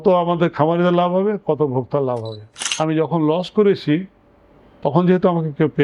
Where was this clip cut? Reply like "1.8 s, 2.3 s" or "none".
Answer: 2.6 s